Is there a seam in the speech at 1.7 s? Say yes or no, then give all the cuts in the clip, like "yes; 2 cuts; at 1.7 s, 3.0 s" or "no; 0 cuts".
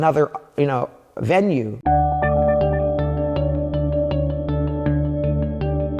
yes; 1 cut; at 1.7 s